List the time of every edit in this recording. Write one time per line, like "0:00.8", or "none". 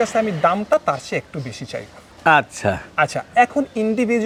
none